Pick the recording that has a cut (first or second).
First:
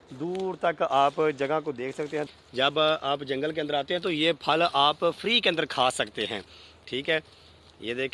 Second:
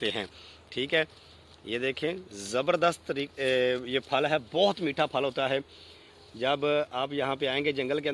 first